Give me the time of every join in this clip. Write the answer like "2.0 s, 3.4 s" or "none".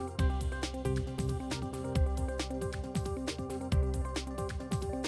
1.2 s

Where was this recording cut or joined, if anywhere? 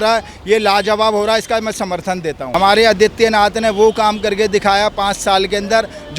2.5 s

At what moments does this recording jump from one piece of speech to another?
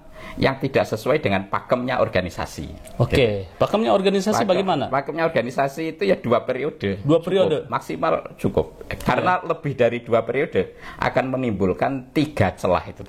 none

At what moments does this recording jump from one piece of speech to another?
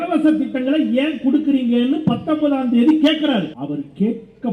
3.6 s

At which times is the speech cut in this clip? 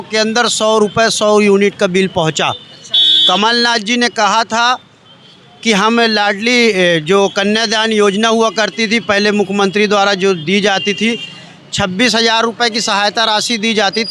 none

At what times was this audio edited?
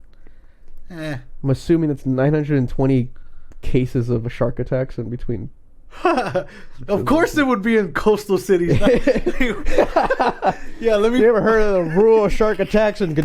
none

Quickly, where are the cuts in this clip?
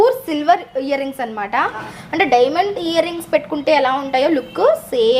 2.0 s

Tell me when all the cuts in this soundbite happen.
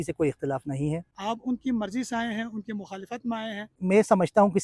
1.1 s, 3.7 s

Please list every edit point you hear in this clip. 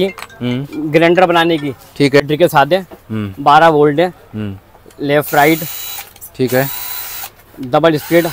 2.3 s

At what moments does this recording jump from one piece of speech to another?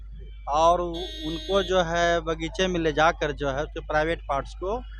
none

